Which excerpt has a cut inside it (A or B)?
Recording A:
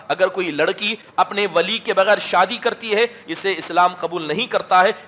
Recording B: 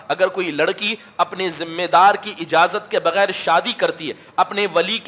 A